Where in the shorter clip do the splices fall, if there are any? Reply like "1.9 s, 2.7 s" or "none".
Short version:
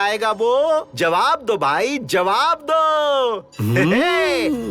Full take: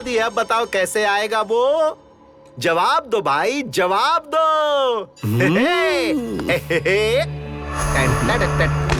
0.9 s